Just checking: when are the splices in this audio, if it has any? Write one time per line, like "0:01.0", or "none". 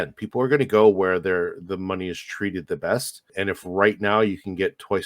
0:03.3